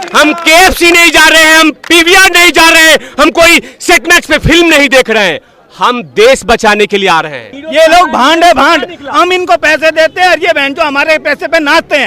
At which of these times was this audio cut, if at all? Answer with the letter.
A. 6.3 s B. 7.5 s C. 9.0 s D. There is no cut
B